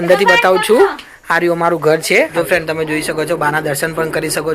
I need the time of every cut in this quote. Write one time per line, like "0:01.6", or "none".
0:02.3